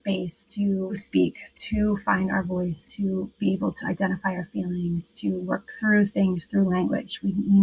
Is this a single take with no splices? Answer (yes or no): no